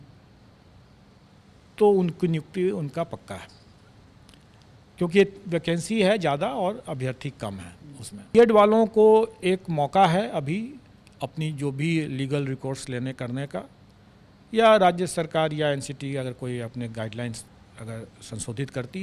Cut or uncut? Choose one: cut